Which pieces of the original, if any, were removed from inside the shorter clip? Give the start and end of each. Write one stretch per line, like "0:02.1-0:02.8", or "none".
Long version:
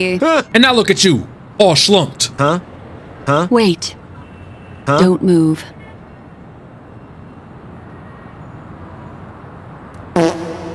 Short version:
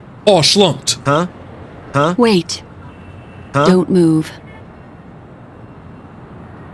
none